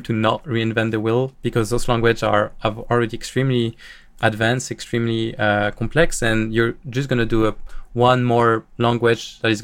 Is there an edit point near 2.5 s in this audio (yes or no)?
no